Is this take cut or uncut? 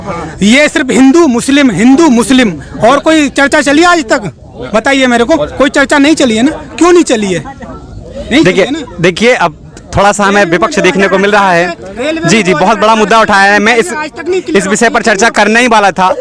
uncut